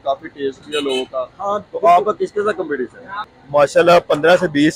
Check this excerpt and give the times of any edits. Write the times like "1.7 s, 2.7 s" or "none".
3.2 s